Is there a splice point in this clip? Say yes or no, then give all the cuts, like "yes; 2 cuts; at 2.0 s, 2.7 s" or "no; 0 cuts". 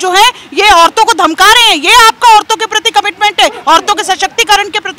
no; 0 cuts